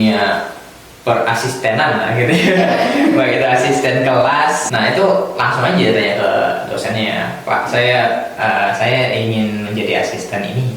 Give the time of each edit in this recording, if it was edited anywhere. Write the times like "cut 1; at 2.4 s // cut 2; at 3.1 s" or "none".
cut 1; at 4.7 s